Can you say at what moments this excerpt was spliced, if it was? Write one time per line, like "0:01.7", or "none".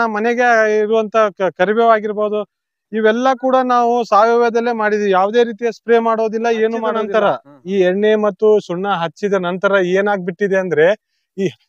0:07.0